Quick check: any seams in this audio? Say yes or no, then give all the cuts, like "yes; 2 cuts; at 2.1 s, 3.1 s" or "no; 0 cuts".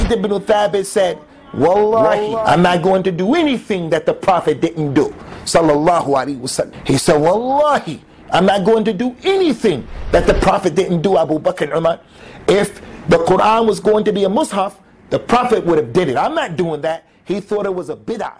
yes; 2 cuts; at 2.3 s, 6.7 s